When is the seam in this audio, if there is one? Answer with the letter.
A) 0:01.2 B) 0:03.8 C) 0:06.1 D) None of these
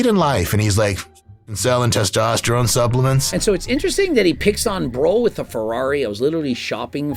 D